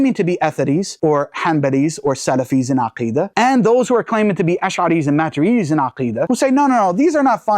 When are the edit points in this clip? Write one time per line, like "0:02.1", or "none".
0:06.2

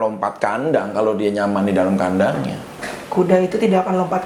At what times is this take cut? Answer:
none

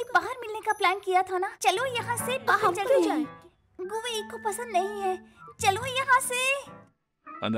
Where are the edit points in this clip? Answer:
0:03.0

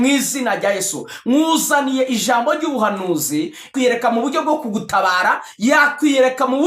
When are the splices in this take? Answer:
0:03.7

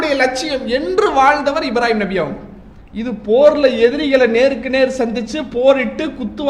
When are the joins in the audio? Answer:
none

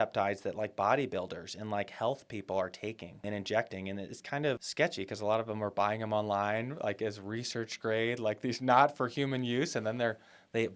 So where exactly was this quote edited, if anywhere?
0:03.2
0:04.6

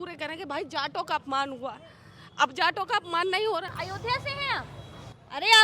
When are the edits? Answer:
0:03.7

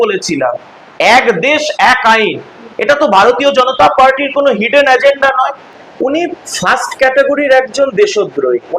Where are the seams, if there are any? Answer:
0:05.7

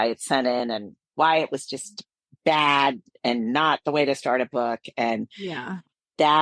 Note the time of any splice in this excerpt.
none

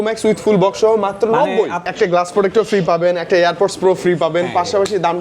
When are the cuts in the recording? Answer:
0:01.8

